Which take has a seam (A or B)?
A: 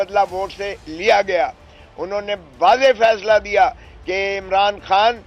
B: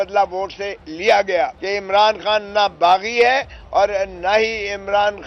B